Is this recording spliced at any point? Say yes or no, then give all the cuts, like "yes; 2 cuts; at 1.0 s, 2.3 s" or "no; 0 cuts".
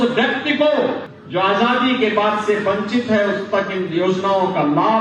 yes; 1 cut; at 1.1 s